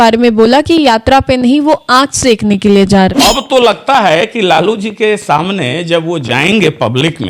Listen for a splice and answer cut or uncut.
cut